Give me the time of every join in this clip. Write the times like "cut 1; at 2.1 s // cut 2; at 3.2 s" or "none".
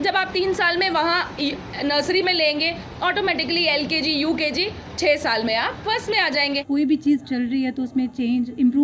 cut 1; at 6.6 s